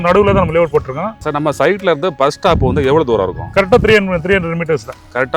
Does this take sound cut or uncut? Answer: cut